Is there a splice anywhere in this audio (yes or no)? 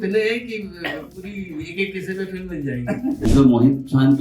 yes